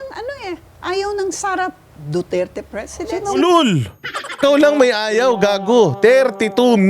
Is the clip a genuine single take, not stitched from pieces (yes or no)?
no